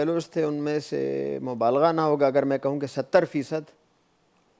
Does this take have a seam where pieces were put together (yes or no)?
no